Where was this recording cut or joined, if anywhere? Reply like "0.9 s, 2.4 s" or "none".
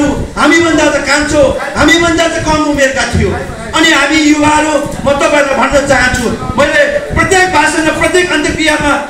none